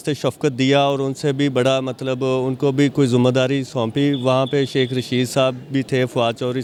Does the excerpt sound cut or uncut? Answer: uncut